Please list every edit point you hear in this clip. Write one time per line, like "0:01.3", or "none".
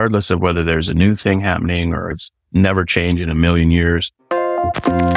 0:04.2